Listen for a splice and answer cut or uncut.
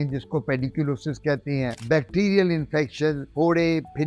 uncut